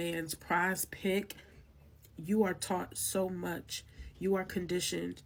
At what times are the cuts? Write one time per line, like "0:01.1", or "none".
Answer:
none